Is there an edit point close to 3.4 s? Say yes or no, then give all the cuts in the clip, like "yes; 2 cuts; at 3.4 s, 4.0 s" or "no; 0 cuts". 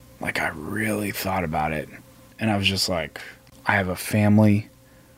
yes; 2 cuts; at 2.3 s, 3.4 s